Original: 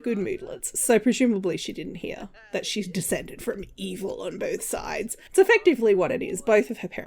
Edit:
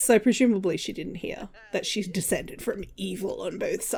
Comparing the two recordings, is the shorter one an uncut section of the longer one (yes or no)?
yes